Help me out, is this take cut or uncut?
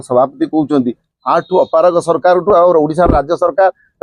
uncut